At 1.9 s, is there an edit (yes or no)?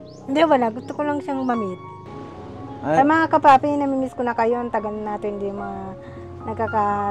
yes